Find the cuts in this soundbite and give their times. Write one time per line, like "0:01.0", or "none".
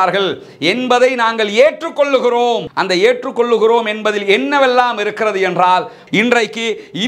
0:06.0